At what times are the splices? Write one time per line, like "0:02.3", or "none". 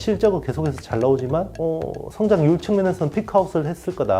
0:01.5